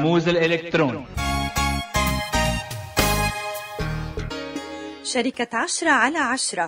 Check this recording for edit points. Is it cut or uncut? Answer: cut